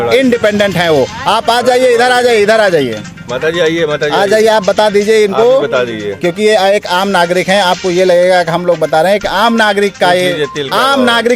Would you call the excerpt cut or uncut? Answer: uncut